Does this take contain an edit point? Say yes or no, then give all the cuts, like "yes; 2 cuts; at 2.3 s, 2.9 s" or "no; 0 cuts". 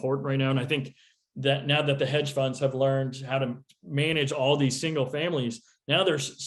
no; 0 cuts